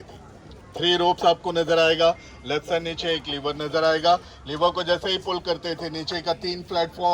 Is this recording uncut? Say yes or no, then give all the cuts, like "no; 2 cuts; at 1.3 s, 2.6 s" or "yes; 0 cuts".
yes; 0 cuts